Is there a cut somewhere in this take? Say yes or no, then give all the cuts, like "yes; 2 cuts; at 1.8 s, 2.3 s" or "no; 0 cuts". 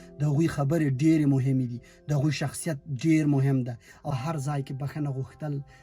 yes; 1 cut; at 4.1 s